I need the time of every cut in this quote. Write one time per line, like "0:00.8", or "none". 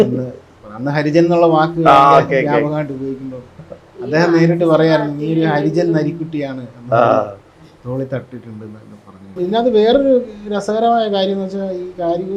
0:09.4